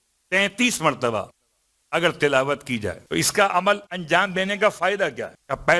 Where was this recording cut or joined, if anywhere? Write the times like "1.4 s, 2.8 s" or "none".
3.0 s

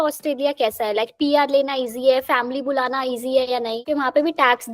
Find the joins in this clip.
3.8 s

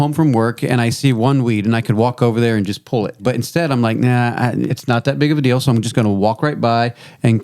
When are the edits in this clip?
3.2 s, 4.7 s

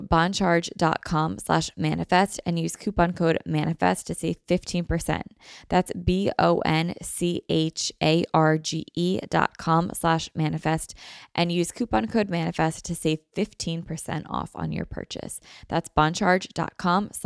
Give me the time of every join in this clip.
none

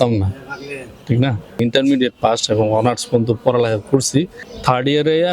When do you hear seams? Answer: 1.6 s, 4.4 s

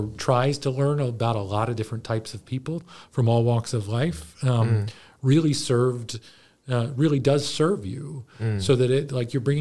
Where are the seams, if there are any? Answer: 2.8 s

